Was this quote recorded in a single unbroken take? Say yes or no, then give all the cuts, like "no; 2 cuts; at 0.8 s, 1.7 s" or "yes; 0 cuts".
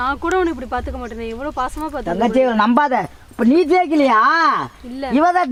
yes; 0 cuts